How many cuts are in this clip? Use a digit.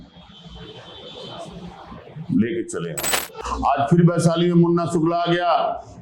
1